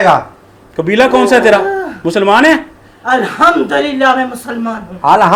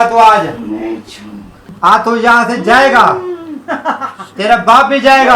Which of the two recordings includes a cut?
second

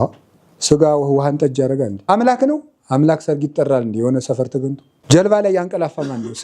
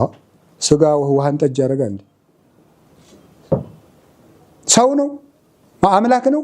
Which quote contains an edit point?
first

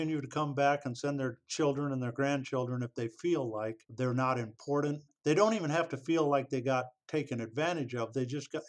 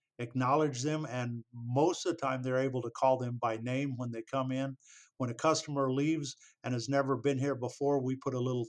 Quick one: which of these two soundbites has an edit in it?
first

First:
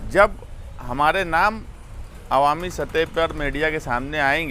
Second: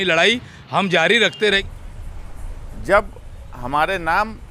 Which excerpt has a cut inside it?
second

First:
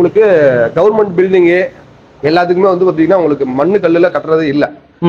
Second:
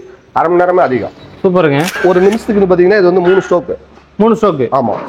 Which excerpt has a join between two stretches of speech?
second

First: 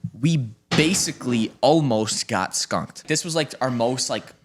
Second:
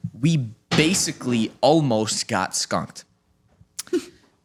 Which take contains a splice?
first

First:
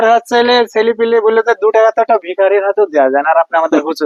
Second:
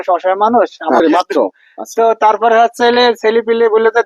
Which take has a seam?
second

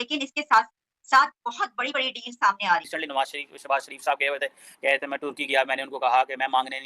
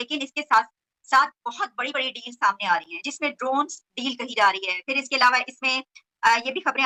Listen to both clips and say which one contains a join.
first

